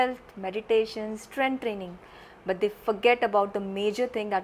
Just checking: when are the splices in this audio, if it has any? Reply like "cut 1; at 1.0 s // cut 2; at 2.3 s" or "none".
none